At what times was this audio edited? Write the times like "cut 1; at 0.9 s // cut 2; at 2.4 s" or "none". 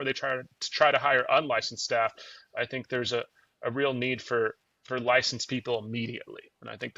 none